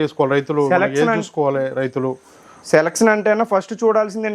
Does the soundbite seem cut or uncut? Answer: uncut